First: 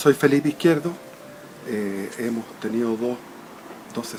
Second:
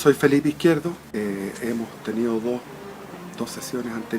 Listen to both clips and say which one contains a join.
second; 1 cut; at 1.0 s

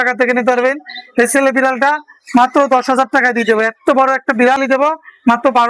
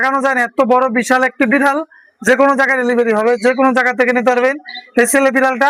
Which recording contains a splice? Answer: first; 1 cut; at 4.6 s

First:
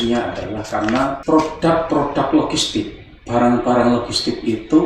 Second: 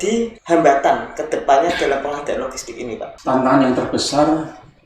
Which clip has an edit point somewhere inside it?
second; 1 cut; at 3.0 s

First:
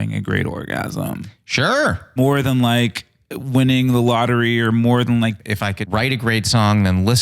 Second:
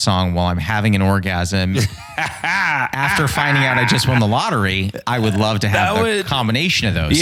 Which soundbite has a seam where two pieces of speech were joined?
first; 2 cuts; at 2.1 s, 5.4 s

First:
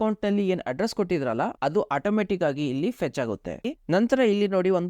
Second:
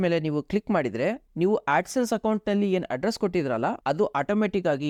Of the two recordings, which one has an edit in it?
first; 1 cut; at 3.7 s

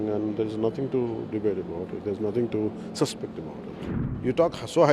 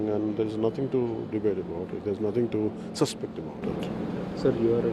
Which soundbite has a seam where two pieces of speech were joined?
first; 1 cut; at 3.8 s

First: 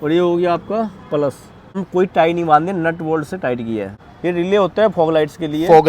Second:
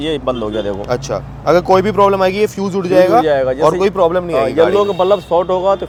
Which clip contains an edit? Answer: first; 2 cuts; at 1.8 s, 3.9 s

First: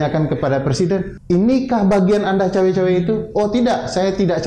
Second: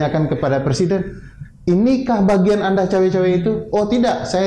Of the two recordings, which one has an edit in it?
first; 1 cut; at 1.1 s

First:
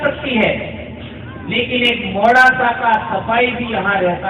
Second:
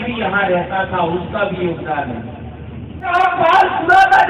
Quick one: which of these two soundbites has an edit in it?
second; 1 cut; at 3.1 s

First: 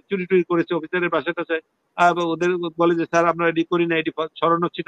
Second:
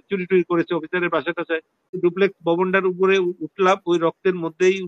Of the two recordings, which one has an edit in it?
second; 1 cut; at 2.0 s

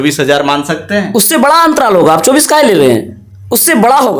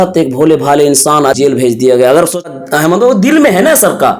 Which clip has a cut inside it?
second; 2 cuts; at 1.3 s, 2.5 s

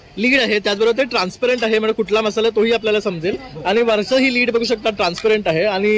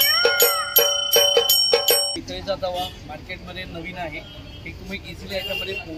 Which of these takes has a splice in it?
second; 1 cut; at 2.1 s

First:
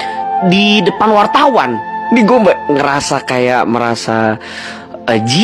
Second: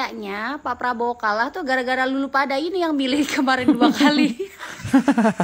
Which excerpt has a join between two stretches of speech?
second; 1 cut; at 3.6 s

